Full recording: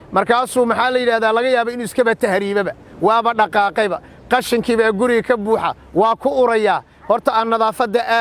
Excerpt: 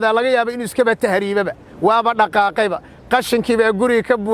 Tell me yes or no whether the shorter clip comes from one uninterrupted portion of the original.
yes